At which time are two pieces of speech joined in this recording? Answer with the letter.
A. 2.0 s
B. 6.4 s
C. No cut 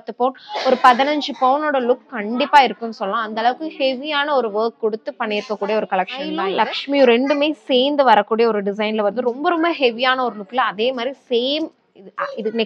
B